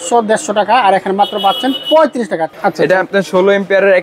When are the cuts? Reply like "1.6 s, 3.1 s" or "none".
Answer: 2.5 s